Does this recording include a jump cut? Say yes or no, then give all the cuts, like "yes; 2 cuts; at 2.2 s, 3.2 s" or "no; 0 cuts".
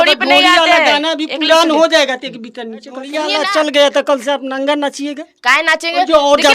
yes; 1 cut; at 3.2 s